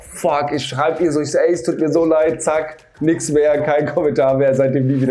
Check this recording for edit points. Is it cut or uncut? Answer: uncut